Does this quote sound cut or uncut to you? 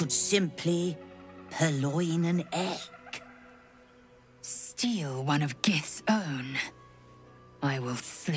uncut